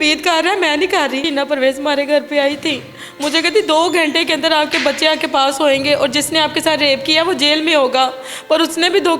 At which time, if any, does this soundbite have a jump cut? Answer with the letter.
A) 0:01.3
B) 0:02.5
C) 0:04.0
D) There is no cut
A